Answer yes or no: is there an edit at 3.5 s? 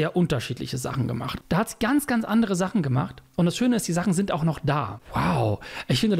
no